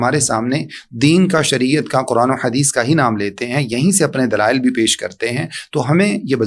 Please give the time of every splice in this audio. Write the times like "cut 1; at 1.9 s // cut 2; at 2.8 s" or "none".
none